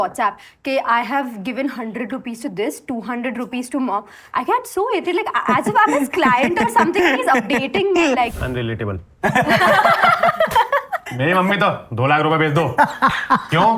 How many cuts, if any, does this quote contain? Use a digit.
2